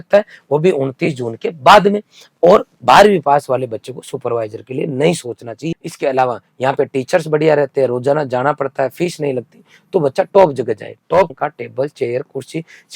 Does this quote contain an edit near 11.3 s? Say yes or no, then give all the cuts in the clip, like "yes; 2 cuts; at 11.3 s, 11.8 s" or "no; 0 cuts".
yes; 2 cuts; at 5.6 s, 11.3 s